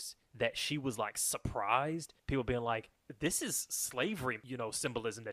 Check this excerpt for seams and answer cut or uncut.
cut